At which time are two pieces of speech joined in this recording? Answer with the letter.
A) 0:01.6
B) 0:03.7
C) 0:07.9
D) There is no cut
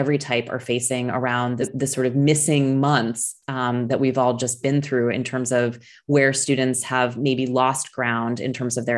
A